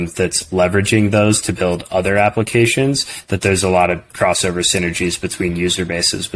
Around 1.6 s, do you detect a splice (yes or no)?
no